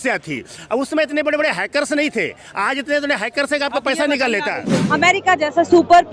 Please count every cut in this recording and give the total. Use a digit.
1